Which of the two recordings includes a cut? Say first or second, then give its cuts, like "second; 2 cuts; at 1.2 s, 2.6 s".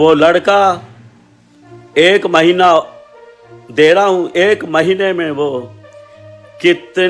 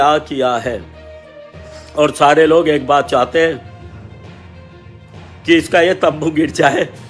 second; 2 cuts; at 3.6 s, 5.3 s